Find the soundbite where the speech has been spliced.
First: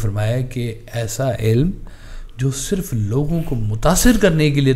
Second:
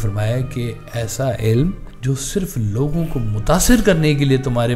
second; 1 cut; at 1.9 s

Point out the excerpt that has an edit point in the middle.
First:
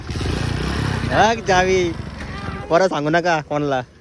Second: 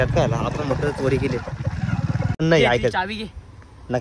second; 1 cut; at 2.4 s

